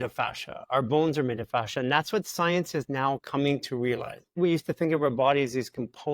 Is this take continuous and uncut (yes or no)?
no